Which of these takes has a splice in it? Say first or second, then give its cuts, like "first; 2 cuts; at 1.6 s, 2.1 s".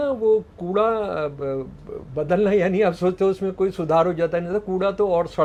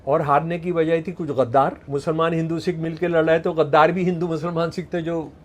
second; 1 cut; at 1.8 s